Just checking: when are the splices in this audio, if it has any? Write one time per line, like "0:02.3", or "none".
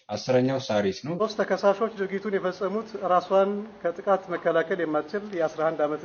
0:01.2